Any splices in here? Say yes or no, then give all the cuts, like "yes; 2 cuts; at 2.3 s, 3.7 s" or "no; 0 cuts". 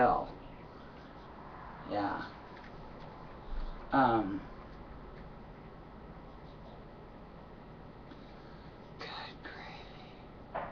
no; 0 cuts